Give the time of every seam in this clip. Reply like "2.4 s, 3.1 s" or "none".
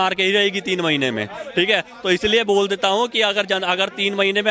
none